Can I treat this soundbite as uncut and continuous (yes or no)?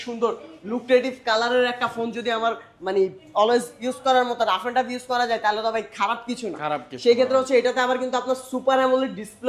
yes